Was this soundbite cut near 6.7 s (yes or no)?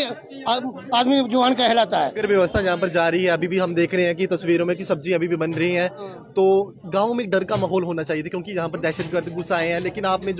no